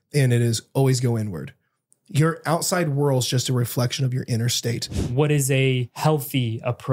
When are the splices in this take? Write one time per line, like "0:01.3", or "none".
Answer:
0:04.9
0:05.9